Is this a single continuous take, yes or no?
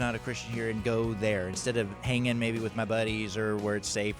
yes